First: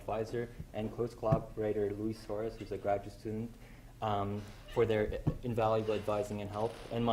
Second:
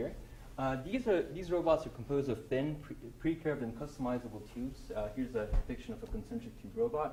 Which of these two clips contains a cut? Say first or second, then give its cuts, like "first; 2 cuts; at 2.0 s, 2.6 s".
first; 1 cut; at 5.8 s